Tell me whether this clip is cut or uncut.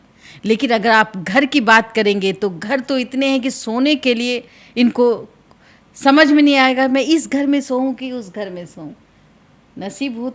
uncut